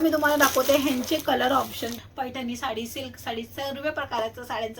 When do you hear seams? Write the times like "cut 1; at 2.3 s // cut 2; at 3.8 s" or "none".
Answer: cut 1; at 1.9 s